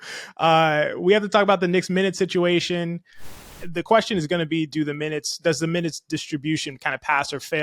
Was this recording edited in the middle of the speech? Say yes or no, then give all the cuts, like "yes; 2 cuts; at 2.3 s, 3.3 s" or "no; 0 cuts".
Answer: yes; 1 cut; at 3.3 s